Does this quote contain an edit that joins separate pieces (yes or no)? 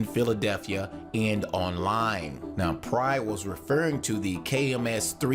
yes